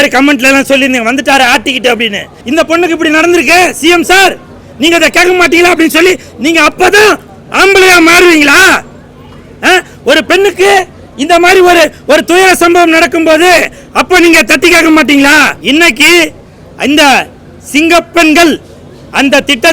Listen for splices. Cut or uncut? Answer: cut